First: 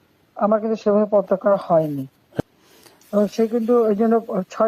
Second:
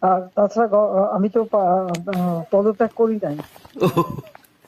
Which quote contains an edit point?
first; 1 cut; at 2.4 s

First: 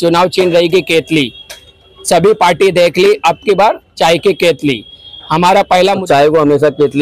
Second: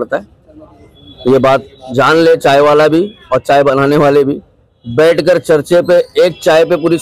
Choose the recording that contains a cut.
first; 1 cut; at 6.0 s

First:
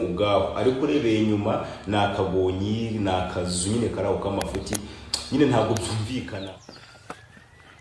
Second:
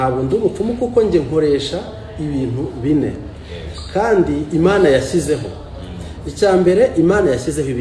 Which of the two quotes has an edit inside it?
first; 1 cut; at 6.3 s

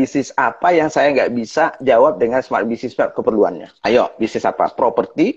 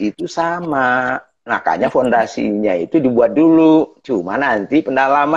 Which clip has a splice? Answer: first; 1 cut; at 3.7 s

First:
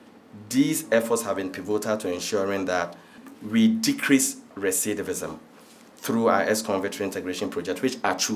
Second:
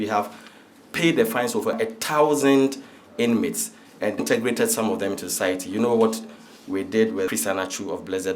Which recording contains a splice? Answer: second; 3 cuts; at 1.8 s, 4.2 s, 7.3 s

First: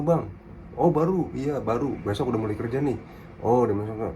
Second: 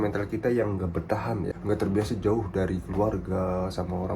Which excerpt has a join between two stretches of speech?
second; 1 cut; at 1.5 s

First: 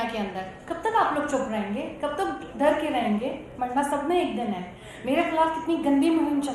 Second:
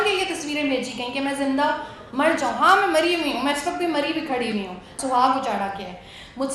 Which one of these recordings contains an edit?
second; 1 cut; at 4.9 s

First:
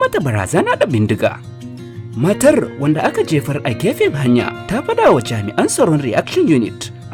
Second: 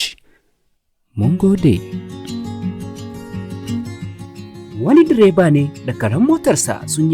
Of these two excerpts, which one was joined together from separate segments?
second; 1 cut; at 1.8 s

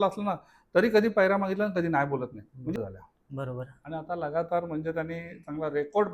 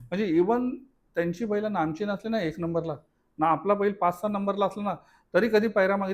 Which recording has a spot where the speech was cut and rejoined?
first; 1 cut; at 2.8 s

